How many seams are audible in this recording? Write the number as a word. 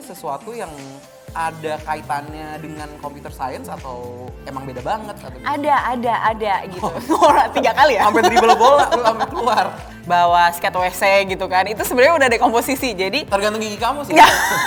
two